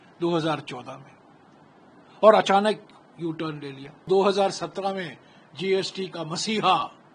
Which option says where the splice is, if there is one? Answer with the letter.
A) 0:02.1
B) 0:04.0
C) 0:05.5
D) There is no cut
B